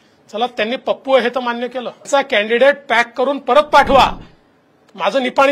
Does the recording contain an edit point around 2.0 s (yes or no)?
yes